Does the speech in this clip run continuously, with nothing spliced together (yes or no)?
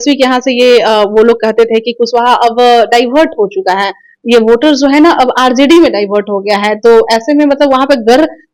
yes